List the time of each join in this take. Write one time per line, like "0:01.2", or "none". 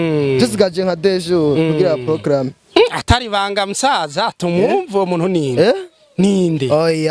none